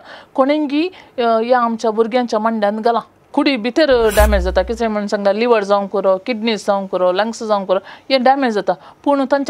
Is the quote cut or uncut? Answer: cut